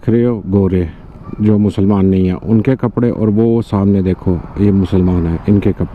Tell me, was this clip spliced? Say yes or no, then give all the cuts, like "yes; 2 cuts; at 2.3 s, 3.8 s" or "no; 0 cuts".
no; 0 cuts